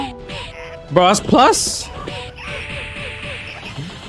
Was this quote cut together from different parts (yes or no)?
yes